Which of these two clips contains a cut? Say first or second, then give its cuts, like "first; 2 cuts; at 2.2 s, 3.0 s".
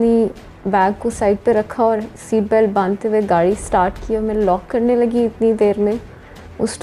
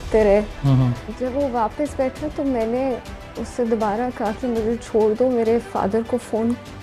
second; 1 cut; at 0.9 s